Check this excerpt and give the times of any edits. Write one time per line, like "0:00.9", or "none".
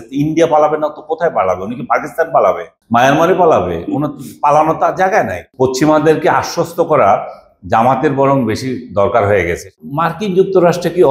0:02.7
0:05.4
0:09.7